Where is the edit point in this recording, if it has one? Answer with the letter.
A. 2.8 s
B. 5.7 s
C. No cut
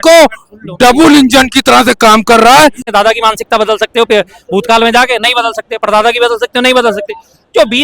A